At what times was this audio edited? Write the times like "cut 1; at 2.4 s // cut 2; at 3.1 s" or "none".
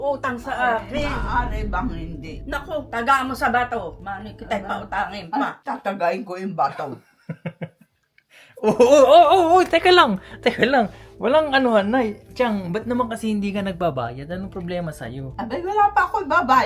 none